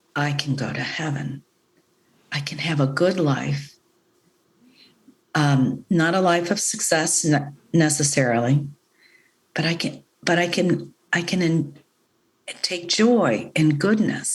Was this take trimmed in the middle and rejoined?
no; 0 cuts

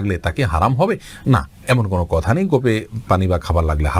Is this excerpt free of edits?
yes; 0 cuts

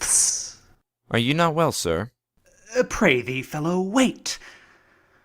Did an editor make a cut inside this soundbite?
yes; 1 cut; at 1.6 s

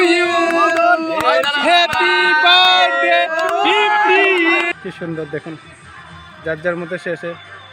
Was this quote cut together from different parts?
yes; 1 cut; at 4.7 s

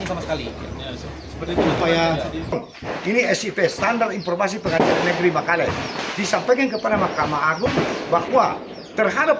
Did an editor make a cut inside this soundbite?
yes; 1 cut; at 2.6 s

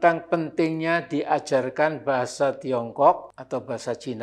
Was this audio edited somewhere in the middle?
yes; 1 cut; at 3.3 s

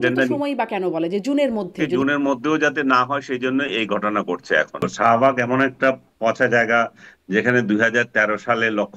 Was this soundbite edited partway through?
yes; 2 cuts; at 1.9 s, 4.9 s

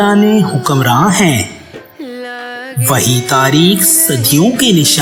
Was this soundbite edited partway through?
no; 0 cuts

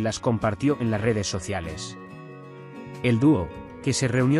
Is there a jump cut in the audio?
yes; 2 cuts; at 1.7 s, 3.0 s

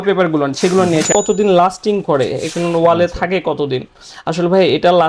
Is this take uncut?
no; 1 cut; at 1.1 s

